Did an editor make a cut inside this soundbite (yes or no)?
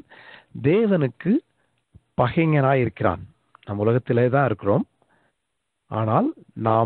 no